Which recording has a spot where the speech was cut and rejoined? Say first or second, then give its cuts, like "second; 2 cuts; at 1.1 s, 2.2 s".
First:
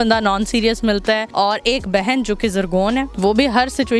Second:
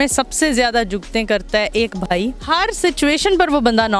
first; 2 cuts; at 1.3 s, 3.1 s